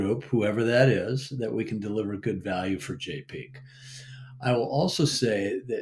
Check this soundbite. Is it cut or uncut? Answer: uncut